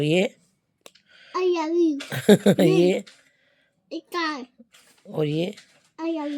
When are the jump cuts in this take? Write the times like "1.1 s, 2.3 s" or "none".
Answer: none